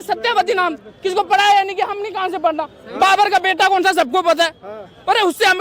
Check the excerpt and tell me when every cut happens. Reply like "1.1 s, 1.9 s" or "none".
none